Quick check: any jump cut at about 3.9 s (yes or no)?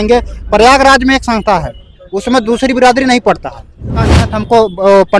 yes